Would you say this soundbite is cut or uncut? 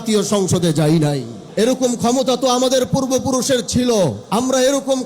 cut